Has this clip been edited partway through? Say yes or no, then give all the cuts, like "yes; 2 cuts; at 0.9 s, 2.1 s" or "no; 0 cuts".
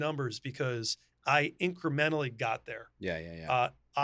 no; 0 cuts